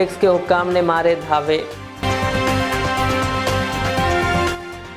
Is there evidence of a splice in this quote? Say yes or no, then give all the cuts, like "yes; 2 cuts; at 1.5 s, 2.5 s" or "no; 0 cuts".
no; 0 cuts